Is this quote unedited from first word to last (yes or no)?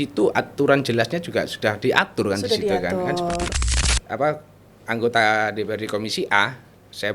no